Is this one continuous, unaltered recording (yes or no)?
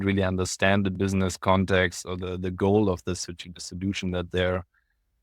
yes